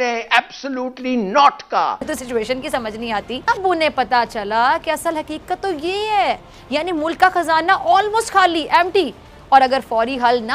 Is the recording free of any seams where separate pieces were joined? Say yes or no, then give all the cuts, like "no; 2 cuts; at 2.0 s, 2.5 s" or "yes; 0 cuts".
no; 2 cuts; at 2.1 s, 3.5 s